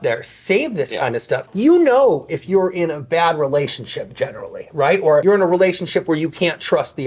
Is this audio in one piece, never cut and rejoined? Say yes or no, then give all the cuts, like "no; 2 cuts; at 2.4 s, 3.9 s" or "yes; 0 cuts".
no; 1 cut; at 5.2 s